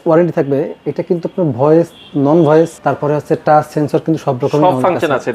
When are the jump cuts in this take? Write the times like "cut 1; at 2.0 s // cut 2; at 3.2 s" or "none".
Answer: cut 1; at 2.8 s